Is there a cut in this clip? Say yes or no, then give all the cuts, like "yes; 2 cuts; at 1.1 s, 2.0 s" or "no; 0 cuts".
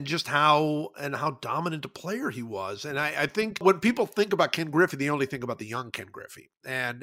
yes; 1 cut; at 3.6 s